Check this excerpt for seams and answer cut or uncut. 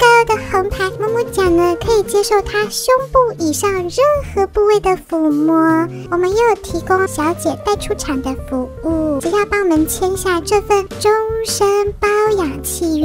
cut